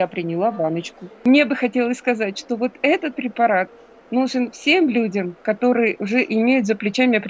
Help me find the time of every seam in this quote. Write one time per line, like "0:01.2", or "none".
0:01.2